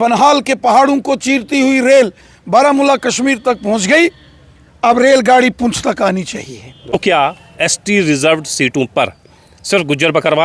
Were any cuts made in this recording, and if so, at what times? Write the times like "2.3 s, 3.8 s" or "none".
6.9 s